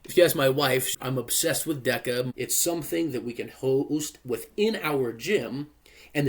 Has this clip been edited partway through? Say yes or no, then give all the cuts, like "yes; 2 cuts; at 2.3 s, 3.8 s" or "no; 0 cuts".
yes; 2 cuts; at 0.9 s, 2.3 s